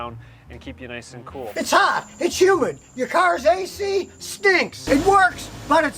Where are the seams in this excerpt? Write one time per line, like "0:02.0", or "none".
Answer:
0:01.5